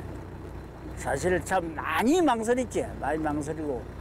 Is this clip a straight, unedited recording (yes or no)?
yes